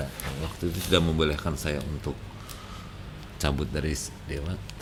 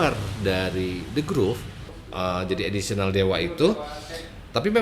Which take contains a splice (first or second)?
second